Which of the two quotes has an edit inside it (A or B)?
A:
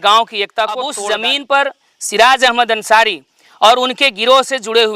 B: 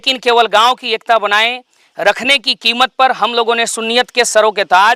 A